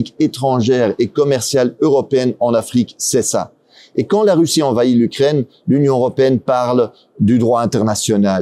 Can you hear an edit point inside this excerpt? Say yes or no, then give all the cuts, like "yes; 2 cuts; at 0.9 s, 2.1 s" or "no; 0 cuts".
no; 0 cuts